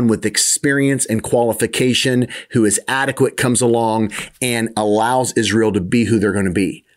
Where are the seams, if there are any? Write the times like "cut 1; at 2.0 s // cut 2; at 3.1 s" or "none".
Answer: none